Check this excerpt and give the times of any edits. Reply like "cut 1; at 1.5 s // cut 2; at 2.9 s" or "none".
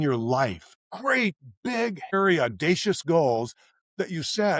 cut 1; at 0.9 s // cut 2; at 2.1 s